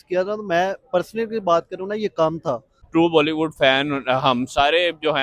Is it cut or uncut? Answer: cut